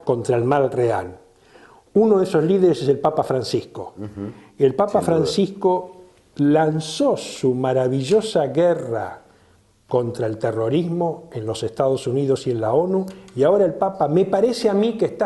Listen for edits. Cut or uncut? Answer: cut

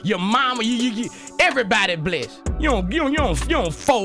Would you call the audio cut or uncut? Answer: uncut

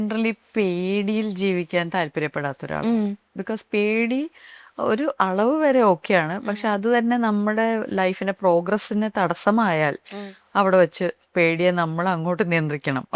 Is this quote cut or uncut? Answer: uncut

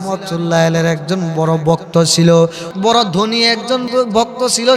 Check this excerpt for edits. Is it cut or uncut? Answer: cut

